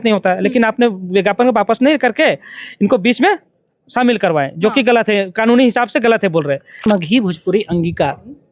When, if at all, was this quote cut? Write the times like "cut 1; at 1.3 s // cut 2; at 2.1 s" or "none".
cut 1; at 6.9 s